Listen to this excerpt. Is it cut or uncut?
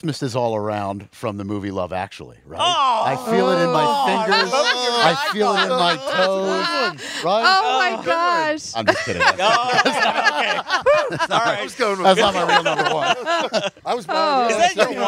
uncut